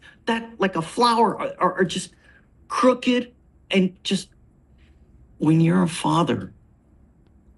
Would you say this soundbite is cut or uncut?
uncut